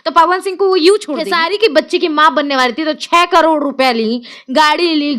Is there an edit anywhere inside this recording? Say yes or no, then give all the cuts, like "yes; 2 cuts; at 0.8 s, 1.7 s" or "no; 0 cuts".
yes; 1 cut; at 1.2 s